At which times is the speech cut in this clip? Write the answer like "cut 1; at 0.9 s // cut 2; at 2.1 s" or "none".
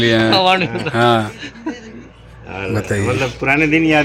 none